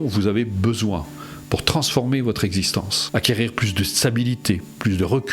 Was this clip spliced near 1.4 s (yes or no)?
no